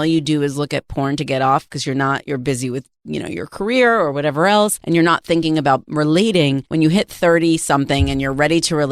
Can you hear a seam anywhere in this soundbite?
yes; 2 cuts; at 4.8 s, 6.6 s

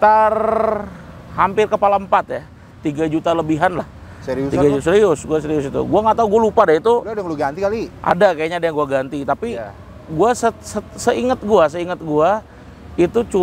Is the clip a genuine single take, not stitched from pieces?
yes; 0 cuts

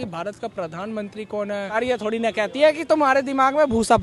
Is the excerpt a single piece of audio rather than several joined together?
no; 1 cut; at 1.7 s

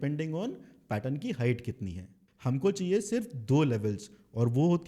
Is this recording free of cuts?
no; 1 cut; at 2.2 s

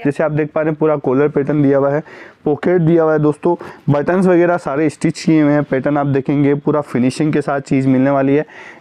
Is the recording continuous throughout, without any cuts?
yes; 0 cuts

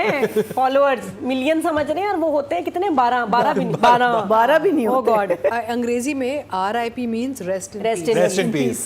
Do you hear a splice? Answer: yes; 1 cut; at 5.6 s

